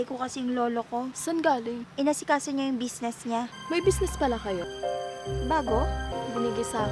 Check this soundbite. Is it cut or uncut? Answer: cut